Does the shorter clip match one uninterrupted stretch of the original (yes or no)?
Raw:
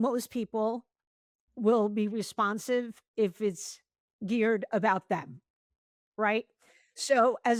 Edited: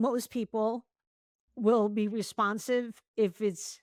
yes